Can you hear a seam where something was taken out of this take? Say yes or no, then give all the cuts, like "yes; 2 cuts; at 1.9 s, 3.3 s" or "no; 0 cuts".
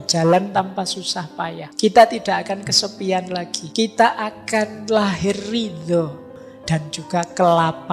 yes; 3 cuts; at 1.6 s, 3.6 s, 6.3 s